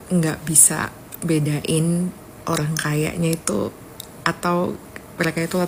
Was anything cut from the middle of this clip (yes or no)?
no